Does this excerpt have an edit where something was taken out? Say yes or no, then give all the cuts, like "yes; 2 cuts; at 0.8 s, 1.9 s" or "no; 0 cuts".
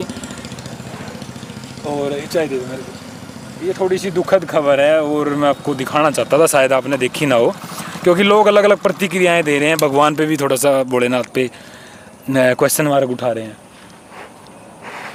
no; 0 cuts